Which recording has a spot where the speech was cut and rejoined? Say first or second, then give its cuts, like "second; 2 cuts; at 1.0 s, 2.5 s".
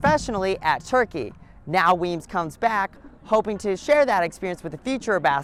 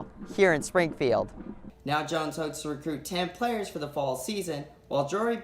second; 1 cut; at 1.7 s